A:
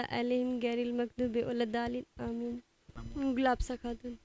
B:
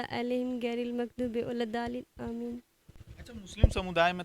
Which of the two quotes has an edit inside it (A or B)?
A